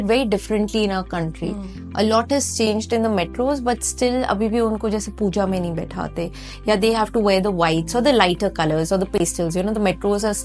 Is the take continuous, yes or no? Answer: yes